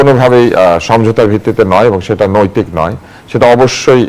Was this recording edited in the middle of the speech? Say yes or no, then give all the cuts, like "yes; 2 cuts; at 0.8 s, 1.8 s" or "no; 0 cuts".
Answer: no; 0 cuts